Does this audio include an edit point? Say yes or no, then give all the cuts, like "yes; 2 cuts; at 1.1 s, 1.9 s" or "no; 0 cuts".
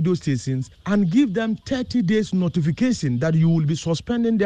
no; 0 cuts